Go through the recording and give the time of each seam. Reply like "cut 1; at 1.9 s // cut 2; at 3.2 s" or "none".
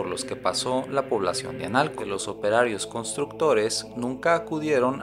cut 1; at 2.1 s